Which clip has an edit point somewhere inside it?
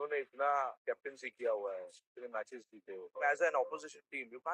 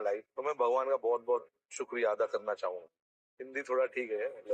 first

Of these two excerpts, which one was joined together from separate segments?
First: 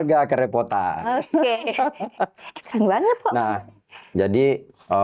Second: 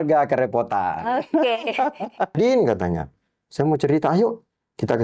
second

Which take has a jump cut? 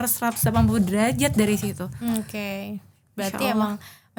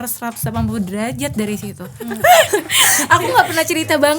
second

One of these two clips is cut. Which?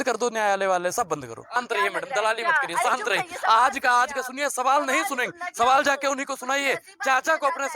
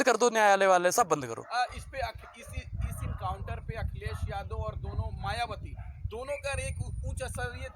first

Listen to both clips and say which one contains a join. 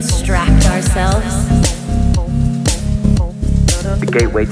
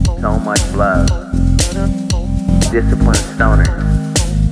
second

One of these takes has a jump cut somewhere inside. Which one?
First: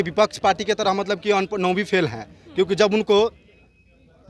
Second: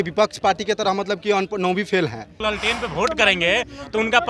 second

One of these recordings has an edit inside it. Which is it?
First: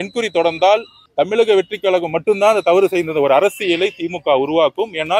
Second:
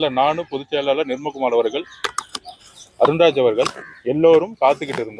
first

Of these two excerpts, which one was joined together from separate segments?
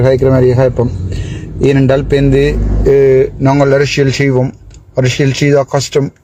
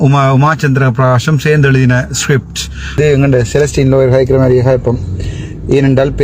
second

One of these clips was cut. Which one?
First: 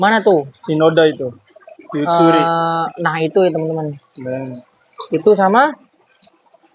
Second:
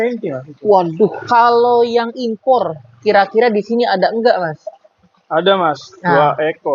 second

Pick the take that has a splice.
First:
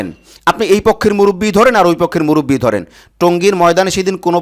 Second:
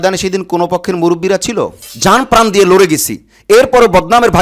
second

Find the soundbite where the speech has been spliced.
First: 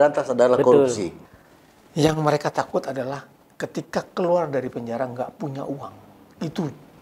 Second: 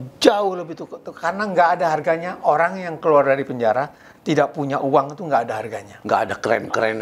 first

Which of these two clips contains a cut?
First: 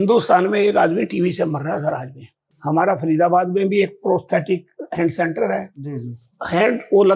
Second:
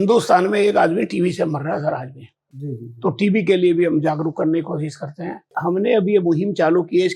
first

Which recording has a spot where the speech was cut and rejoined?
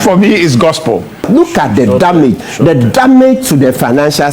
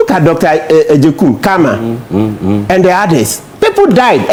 first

